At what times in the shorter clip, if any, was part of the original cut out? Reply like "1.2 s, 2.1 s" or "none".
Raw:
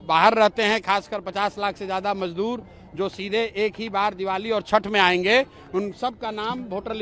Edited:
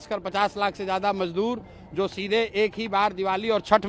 none